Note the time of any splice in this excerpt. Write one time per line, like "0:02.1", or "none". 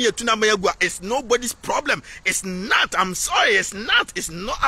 none